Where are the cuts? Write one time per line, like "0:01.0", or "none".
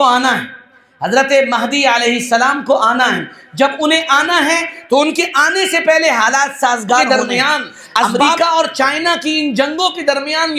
0:07.1